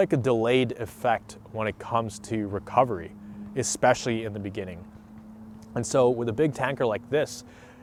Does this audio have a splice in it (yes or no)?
no